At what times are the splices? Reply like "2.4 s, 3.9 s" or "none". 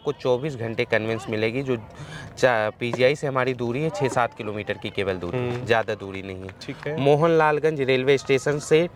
none